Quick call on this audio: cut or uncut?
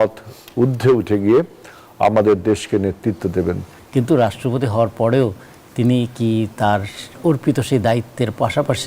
cut